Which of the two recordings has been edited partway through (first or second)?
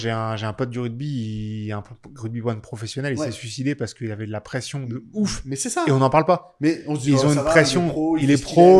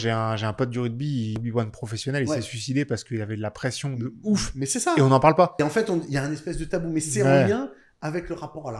second